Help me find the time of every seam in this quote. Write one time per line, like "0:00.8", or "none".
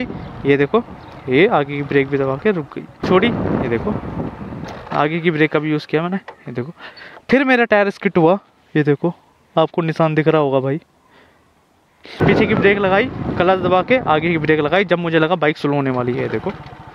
0:03.0
0:12.2